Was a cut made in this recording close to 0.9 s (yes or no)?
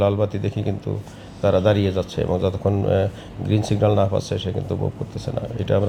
no